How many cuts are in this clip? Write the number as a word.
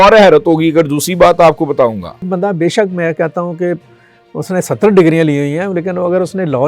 one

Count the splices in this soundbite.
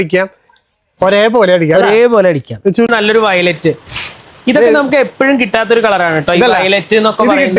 one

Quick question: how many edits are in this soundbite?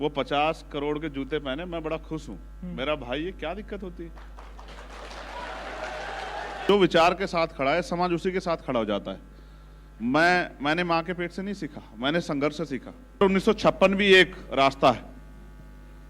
two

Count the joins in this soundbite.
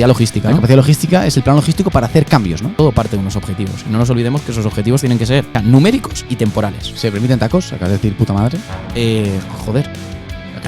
three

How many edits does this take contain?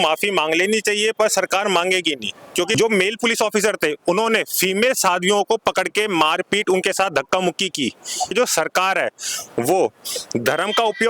two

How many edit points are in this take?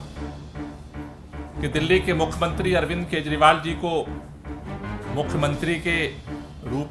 zero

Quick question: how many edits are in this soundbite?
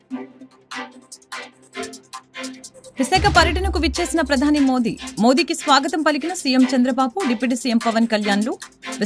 one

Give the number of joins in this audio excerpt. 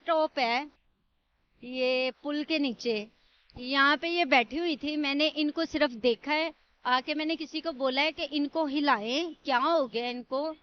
zero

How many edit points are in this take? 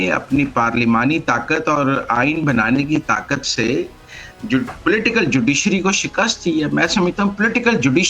zero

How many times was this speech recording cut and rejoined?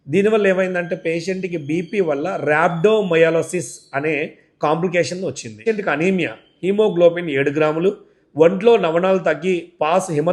one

